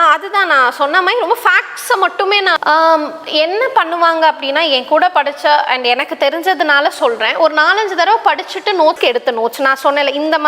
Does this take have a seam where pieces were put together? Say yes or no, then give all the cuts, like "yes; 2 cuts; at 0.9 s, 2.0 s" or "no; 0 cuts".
yes; 2 cuts; at 2.5 s, 9.0 s